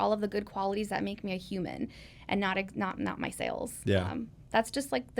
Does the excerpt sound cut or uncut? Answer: uncut